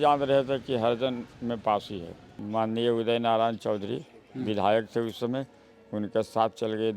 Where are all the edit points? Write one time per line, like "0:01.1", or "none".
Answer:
0:02.4